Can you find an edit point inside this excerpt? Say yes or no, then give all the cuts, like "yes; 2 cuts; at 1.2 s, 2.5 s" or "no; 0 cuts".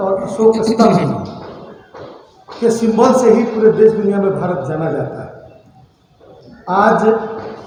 no; 0 cuts